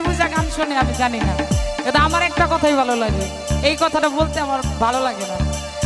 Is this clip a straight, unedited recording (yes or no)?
yes